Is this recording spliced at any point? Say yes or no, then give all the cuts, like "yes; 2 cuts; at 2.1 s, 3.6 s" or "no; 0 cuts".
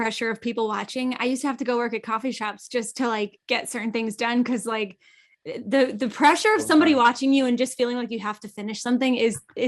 no; 0 cuts